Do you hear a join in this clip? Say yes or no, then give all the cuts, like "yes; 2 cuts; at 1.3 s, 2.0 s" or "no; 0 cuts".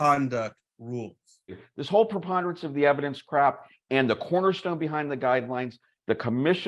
yes; 1 cut; at 1.6 s